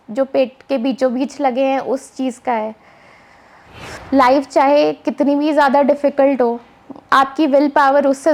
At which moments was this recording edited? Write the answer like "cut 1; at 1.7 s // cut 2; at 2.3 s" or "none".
cut 1; at 3.9 s